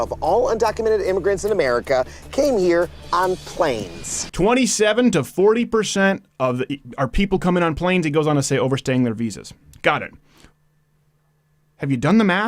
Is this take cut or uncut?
cut